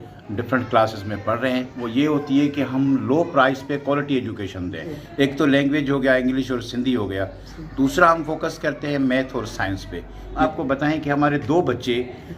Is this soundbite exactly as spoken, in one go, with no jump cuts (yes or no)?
no